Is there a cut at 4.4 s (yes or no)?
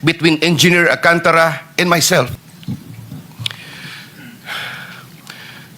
no